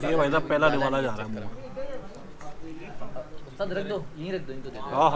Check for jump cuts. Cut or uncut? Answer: uncut